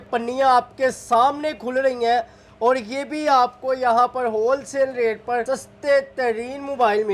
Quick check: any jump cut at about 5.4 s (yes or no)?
yes